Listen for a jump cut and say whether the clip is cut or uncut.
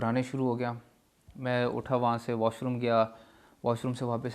uncut